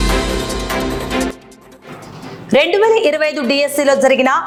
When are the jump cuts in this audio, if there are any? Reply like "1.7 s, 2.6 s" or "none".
none